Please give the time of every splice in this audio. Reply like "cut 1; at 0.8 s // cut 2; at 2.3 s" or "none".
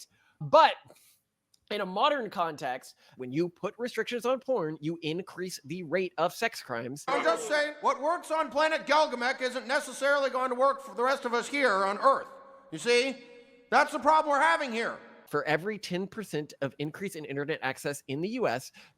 cut 1; at 3.1 s // cut 2; at 7.0 s // cut 3; at 15.2 s